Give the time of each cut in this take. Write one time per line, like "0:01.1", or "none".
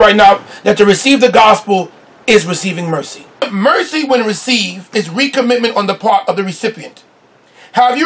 0:03.2